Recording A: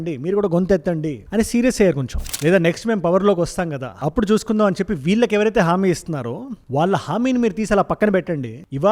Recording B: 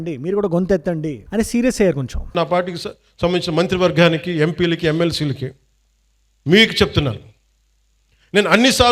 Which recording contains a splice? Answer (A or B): A